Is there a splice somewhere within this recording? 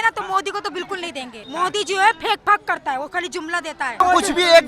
yes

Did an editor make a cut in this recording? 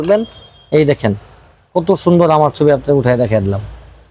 no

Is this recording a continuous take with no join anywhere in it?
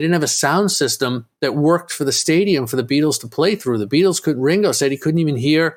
yes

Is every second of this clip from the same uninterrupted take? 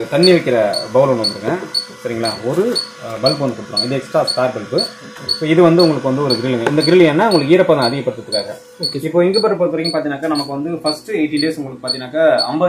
yes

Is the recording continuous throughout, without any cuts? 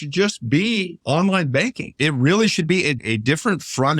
no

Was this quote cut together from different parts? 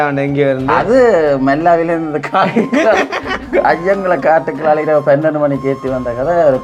no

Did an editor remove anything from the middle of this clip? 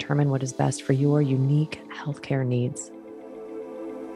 yes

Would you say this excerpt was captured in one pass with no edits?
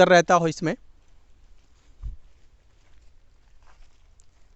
yes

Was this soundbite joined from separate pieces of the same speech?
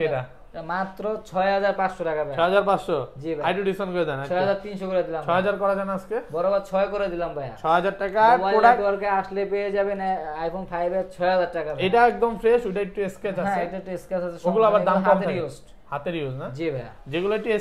no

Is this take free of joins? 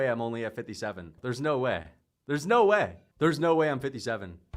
no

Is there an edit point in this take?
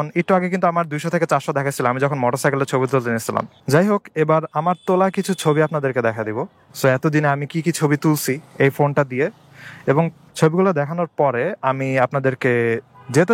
yes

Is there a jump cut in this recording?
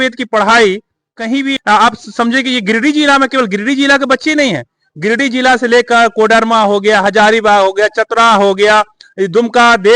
yes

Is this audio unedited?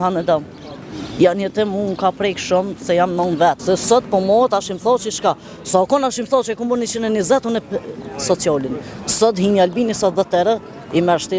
no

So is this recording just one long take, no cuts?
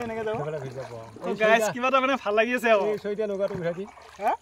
yes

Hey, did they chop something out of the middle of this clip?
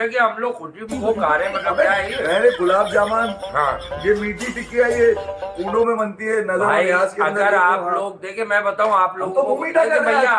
no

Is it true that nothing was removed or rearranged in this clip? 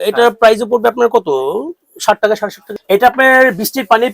no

